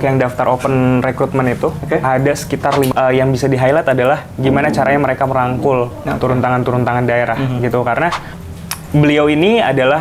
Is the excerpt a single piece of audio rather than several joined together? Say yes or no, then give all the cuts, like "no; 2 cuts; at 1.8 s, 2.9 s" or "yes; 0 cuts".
no; 2 cuts; at 2.9 s, 8.3 s